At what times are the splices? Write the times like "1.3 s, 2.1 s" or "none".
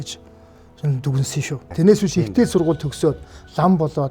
1.6 s